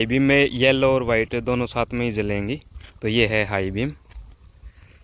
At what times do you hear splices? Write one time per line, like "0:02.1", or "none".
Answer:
none